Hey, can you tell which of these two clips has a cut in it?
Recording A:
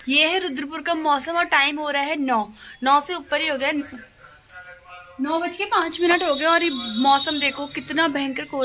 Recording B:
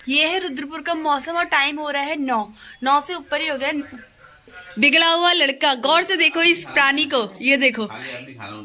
B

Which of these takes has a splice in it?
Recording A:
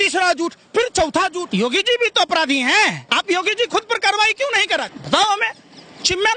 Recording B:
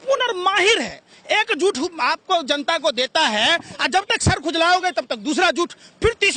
A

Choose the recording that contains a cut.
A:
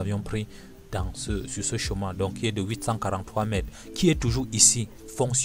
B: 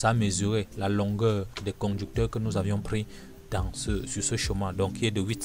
B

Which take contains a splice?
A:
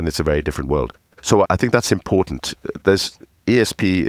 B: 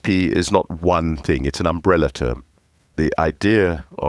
B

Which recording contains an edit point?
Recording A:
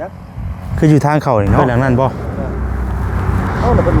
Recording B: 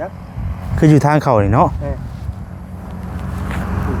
A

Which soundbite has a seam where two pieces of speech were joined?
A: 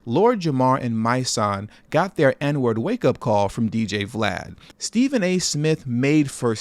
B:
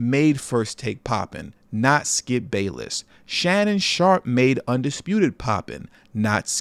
A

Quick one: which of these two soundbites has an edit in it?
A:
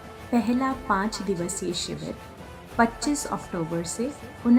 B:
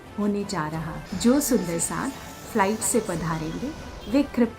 B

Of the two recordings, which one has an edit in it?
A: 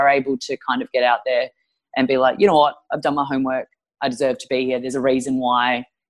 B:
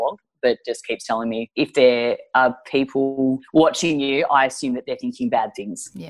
B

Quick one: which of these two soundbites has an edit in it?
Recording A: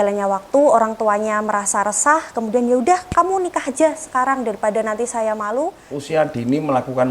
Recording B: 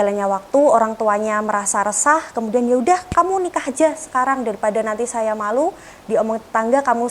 A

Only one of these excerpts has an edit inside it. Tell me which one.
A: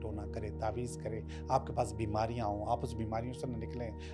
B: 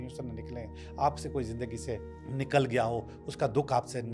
B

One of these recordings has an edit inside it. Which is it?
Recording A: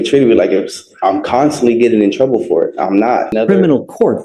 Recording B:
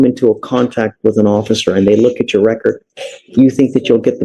A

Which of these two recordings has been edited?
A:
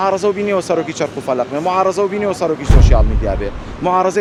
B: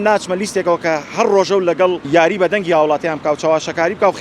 B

